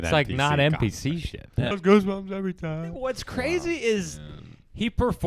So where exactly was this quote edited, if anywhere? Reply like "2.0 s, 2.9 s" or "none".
1.8 s